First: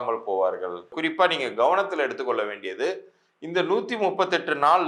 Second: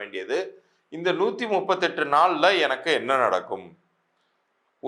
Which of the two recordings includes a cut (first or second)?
first